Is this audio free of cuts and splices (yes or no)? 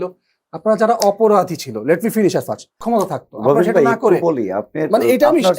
no